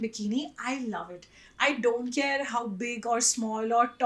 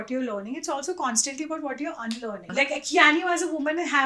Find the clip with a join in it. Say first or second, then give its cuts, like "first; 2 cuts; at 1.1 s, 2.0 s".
second; 1 cut; at 2.5 s